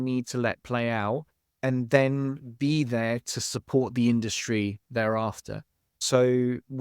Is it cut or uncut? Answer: uncut